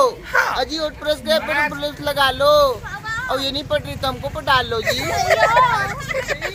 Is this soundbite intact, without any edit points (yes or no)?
yes